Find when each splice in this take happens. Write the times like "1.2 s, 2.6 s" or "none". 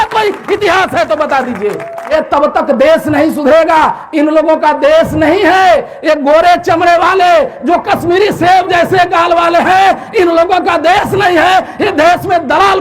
2.1 s